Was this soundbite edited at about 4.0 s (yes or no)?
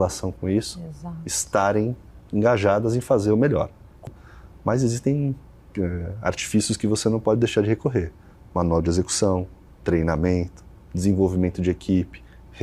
yes